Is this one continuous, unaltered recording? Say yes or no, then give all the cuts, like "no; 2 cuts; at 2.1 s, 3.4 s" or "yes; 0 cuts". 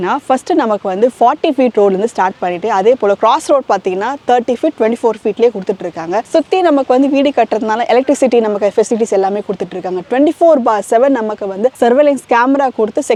yes; 0 cuts